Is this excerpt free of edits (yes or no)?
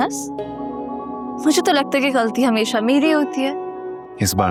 yes